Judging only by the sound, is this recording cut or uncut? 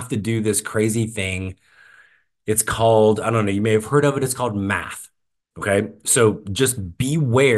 uncut